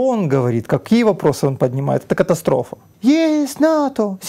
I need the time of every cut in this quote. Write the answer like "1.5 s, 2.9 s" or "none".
2.9 s

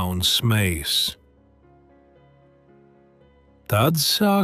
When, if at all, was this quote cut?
1.2 s, 3.5 s

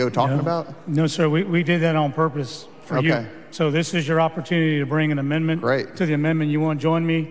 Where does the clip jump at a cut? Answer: none

